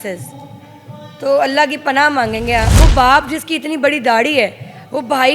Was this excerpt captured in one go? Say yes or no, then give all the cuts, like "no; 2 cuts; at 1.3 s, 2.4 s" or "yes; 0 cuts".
no; 1 cut; at 2.7 s